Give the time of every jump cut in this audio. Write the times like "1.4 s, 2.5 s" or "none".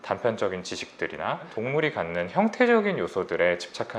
1.5 s